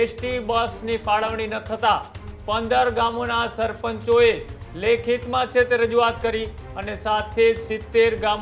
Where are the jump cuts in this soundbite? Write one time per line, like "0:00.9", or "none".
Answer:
none